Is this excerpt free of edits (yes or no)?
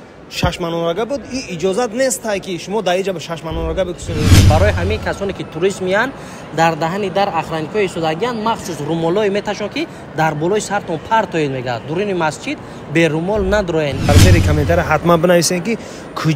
no